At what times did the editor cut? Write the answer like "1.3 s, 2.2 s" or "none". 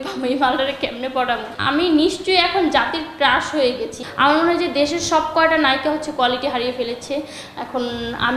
1.5 s, 4.0 s